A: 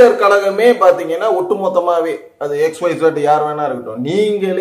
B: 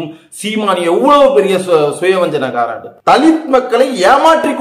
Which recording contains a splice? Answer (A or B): B